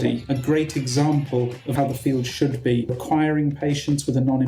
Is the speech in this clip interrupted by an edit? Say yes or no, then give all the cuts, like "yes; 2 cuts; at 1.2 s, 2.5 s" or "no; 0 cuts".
yes; 2 cuts; at 1.6 s, 2.9 s